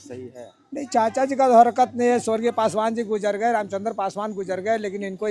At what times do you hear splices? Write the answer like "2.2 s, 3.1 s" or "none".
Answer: none